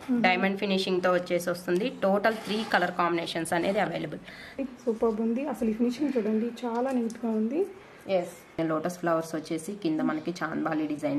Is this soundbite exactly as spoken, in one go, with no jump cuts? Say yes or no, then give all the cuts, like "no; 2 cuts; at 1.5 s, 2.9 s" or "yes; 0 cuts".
no; 2 cuts; at 4.6 s, 8.6 s